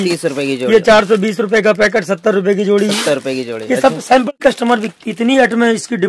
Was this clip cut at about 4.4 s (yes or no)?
yes